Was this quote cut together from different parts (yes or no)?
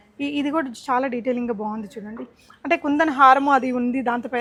no